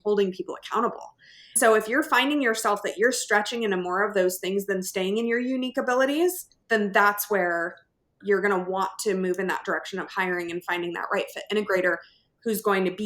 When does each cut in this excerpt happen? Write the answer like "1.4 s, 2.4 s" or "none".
1.6 s, 6.5 s